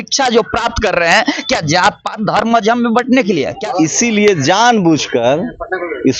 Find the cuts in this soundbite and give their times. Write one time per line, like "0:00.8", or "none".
0:03.6